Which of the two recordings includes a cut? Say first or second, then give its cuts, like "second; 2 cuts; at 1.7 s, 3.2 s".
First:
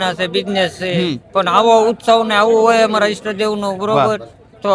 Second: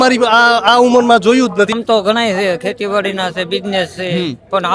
second; 1 cut; at 1.7 s